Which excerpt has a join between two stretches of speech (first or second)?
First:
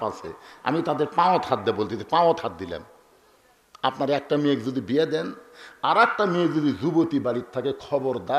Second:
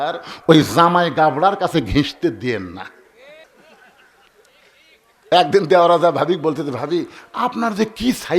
second